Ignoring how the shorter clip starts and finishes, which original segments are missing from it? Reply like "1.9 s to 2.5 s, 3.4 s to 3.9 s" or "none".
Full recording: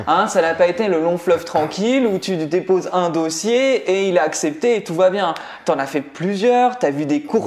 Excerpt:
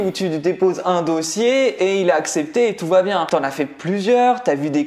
5.3 s to 5.6 s